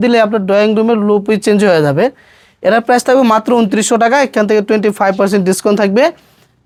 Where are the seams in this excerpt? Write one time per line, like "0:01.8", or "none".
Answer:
none